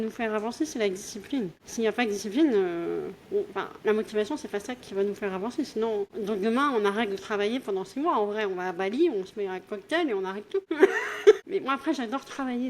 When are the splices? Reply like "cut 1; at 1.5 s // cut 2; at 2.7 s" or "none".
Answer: cut 1; at 1.6 s // cut 2; at 3.6 s // cut 3; at 6.1 s // cut 4; at 10.7 s // cut 5; at 11.4 s